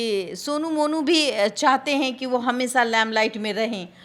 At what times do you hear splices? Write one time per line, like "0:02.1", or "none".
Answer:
none